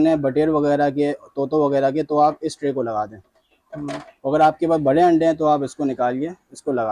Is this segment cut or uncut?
uncut